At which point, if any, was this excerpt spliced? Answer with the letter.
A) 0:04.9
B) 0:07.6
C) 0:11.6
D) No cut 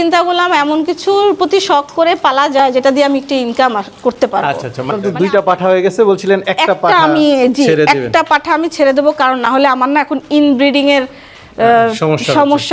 A